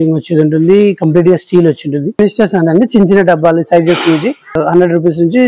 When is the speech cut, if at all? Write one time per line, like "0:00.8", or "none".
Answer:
0:02.2